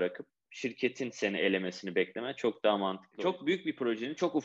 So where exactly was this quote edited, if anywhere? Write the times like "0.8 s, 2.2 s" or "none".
3.1 s